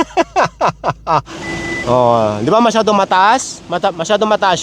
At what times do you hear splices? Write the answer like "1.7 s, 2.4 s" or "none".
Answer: 1.4 s